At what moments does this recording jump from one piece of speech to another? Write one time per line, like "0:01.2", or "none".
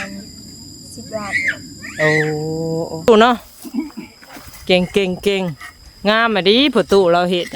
0:03.1